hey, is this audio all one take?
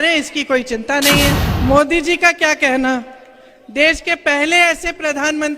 no; 1 cut; at 1.5 s

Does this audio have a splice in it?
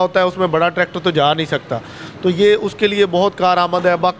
no; 0 cuts

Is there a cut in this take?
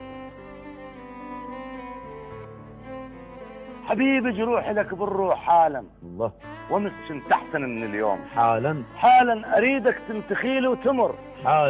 no; 0 cuts

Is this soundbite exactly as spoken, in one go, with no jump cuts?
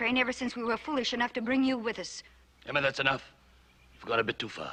yes; 0 cuts

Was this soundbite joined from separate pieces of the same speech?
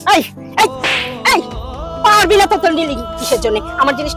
no; 0 cuts

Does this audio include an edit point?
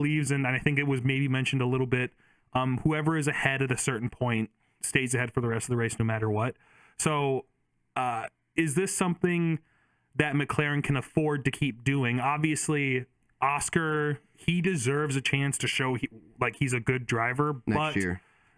no; 0 cuts

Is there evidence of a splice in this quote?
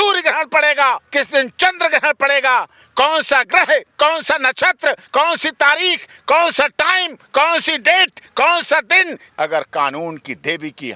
yes; 2 cuts; at 1.0 s, 9.2 s

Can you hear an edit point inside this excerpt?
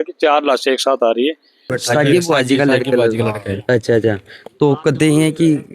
yes; 1 cut; at 1.8 s

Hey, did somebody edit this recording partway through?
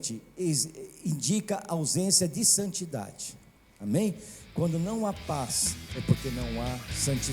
no; 0 cuts

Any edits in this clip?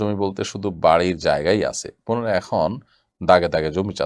no; 0 cuts

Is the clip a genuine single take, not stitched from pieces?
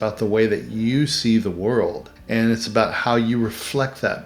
no; 1 cut; at 2.1 s

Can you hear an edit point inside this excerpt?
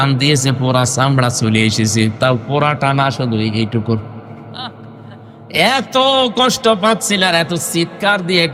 no; 0 cuts

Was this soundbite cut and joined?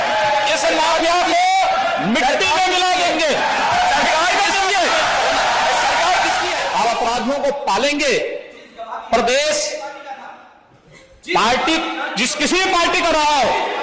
yes; 1 cut; at 6.6 s

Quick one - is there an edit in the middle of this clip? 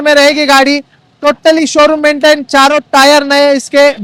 no; 0 cuts

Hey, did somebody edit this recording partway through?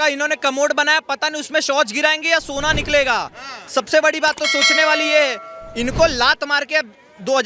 no; 0 cuts

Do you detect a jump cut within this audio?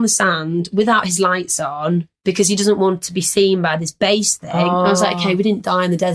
no; 0 cuts

